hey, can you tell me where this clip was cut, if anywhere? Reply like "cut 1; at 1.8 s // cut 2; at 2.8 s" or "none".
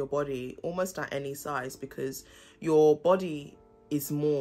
none